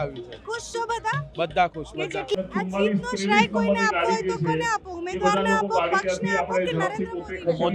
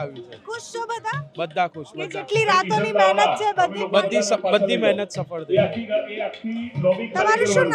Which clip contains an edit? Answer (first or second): first